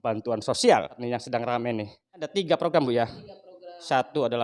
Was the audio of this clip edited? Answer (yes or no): yes